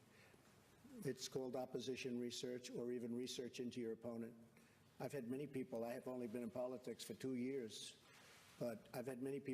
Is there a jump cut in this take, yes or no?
yes